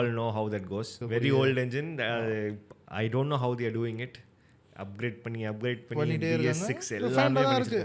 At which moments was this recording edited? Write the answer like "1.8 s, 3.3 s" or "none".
1.0 s